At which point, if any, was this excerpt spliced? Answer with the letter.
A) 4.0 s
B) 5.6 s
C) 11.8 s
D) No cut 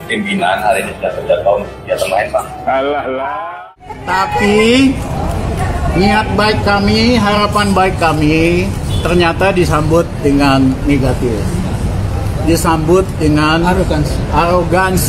A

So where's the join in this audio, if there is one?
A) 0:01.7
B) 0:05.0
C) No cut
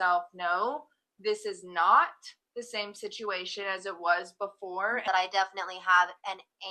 B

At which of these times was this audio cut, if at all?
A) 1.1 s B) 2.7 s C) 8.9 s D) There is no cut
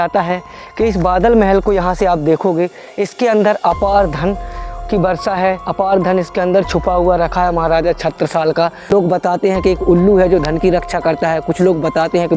C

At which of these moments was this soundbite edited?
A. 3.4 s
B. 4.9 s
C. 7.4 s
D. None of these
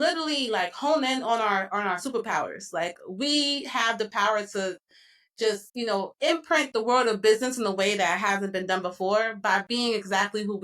D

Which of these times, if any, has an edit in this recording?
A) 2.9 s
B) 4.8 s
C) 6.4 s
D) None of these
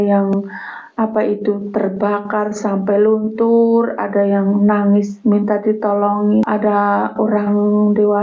C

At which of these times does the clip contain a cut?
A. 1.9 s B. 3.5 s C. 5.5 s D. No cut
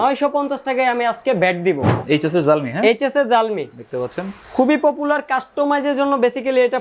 A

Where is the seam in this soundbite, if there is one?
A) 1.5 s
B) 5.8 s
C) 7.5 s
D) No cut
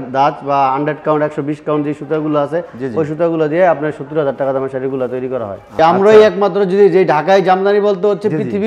B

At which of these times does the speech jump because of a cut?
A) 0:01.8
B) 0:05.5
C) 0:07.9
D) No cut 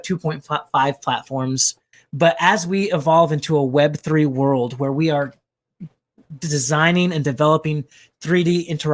A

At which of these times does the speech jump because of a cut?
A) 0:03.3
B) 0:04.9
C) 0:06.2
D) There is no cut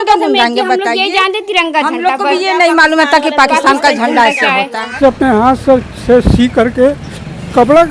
B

